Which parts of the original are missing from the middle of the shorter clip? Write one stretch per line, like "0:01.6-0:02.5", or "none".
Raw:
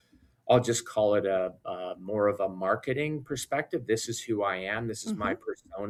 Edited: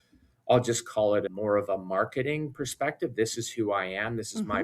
0:01.3-0:02.0